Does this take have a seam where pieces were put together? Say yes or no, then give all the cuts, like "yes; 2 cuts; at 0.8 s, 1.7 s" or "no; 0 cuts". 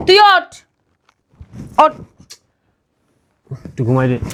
no; 0 cuts